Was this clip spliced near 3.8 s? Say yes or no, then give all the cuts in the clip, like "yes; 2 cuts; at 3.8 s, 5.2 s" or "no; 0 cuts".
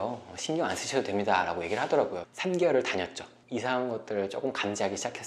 no; 1 cut; at 2.2 s